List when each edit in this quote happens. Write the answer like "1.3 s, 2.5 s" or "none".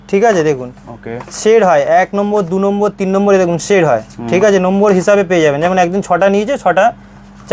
none